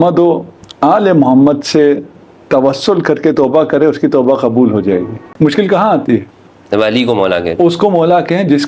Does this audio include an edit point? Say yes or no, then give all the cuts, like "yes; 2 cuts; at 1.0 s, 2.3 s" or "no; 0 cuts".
yes; 1 cut; at 5.2 s